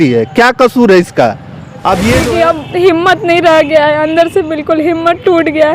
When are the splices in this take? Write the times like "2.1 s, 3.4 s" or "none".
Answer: 2.2 s